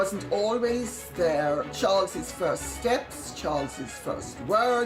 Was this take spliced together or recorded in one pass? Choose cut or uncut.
cut